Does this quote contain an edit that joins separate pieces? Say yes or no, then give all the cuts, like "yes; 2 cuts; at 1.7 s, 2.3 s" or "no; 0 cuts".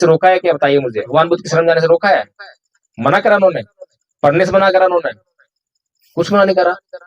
yes; 1 cut; at 1.0 s